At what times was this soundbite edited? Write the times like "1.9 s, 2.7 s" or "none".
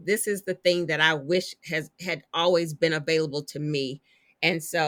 none